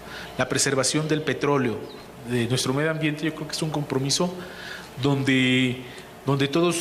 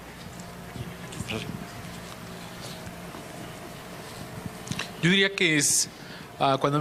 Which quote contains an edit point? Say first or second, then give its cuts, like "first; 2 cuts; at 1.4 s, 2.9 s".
first; 1 cut; at 3.3 s